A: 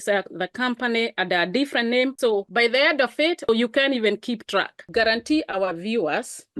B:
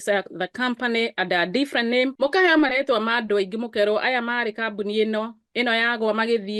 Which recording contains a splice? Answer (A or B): A